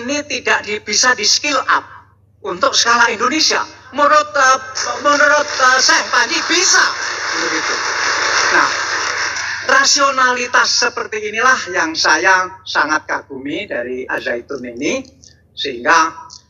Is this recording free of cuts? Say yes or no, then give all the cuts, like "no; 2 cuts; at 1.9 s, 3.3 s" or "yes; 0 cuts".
yes; 0 cuts